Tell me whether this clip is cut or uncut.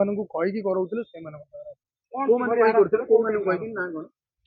uncut